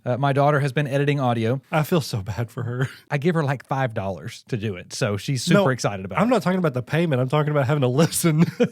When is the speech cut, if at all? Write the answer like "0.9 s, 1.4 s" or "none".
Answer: 1.6 s, 3.0 s